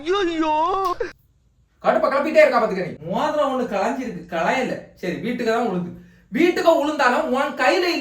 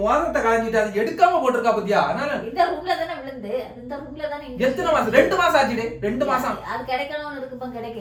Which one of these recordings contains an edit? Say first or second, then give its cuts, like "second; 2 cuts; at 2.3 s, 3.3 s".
first; 2 cuts; at 1.6 s, 3.0 s